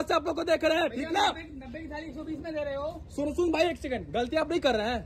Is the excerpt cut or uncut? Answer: uncut